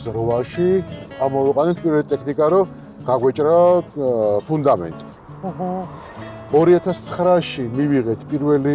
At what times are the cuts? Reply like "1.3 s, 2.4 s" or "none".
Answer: 1.0 s